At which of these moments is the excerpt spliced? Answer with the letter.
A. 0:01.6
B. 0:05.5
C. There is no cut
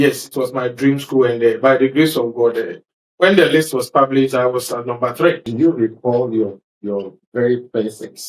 B